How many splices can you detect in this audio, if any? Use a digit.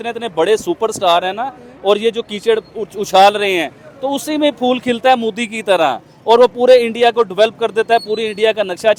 0